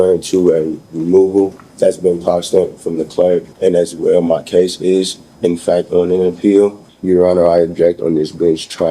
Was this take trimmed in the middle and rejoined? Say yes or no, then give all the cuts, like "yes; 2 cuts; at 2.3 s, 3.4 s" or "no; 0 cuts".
yes; 3 cuts; at 1.6 s, 3.5 s, 6.9 s